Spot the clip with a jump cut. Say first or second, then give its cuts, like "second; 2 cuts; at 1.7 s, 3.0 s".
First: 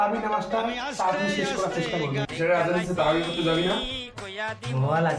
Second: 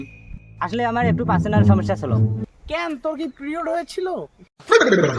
first; 1 cut; at 2.3 s